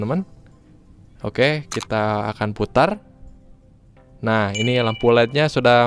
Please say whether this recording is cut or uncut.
uncut